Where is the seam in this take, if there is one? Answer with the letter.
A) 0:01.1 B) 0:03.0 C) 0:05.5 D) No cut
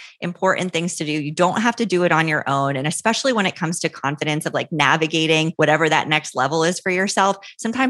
C